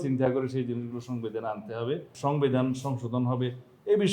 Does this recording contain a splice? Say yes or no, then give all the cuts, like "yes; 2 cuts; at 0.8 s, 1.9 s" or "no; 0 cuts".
yes; 1 cut; at 2.1 s